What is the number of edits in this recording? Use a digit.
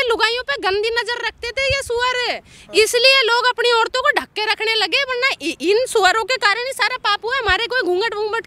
0